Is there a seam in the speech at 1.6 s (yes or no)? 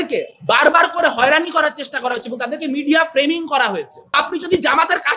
no